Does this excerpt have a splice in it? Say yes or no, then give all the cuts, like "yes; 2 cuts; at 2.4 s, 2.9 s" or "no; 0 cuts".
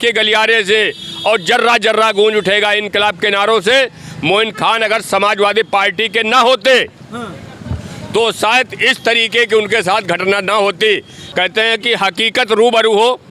yes; 1 cut; at 11.2 s